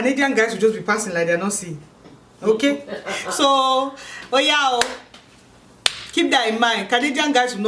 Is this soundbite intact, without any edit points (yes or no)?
yes